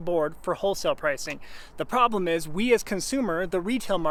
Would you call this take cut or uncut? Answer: uncut